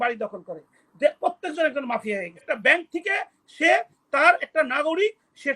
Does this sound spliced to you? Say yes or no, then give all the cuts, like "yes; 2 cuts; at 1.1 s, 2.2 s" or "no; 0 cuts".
yes; 1 cut; at 2.4 s